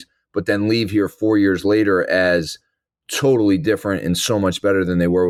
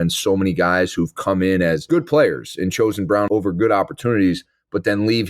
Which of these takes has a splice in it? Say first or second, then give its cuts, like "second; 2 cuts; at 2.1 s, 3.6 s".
second; 2 cuts; at 1.9 s, 3.3 s